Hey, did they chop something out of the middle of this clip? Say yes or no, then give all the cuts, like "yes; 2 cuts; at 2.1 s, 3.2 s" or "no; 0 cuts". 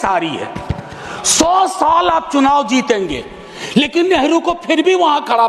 no; 0 cuts